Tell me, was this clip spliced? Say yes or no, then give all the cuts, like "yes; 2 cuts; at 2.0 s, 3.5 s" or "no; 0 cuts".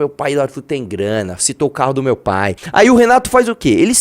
yes; 1 cut; at 2.6 s